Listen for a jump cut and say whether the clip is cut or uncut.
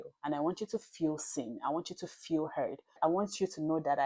uncut